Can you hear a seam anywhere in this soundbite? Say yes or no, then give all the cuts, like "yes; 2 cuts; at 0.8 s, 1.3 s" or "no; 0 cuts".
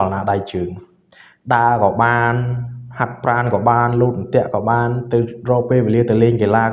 no; 0 cuts